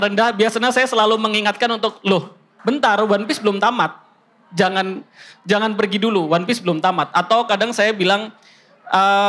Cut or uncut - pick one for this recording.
uncut